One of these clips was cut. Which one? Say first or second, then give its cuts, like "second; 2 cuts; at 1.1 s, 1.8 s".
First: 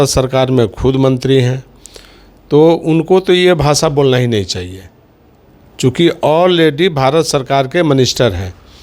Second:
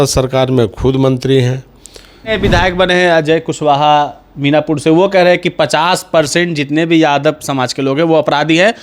second; 1 cut; at 2.2 s